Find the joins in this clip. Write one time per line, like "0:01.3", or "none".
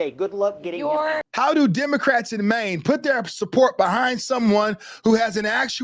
0:01.3